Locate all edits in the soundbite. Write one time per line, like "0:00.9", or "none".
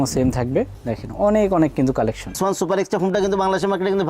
0:02.4